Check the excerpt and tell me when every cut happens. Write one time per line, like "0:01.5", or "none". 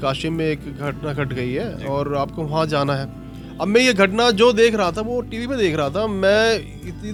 none